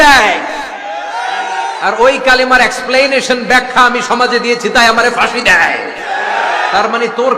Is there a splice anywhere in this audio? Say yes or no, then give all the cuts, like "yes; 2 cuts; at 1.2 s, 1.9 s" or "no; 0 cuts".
no; 0 cuts